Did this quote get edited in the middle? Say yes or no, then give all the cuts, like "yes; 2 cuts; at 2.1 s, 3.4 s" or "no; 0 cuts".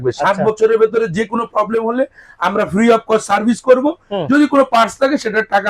no; 0 cuts